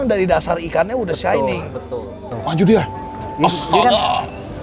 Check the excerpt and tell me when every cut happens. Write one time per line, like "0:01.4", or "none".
0:02.3